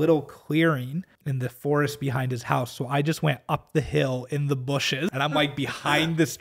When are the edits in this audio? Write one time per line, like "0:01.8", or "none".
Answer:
0:01.2
0:05.1